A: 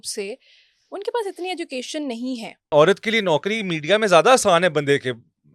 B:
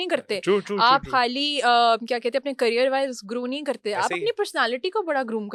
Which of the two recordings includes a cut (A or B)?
A